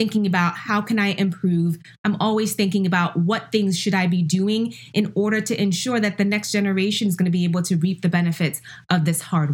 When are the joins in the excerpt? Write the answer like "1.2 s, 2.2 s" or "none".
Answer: none